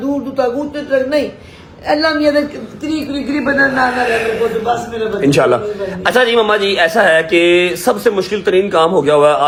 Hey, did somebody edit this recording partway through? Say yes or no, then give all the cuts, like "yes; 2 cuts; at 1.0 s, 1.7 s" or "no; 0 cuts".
no; 0 cuts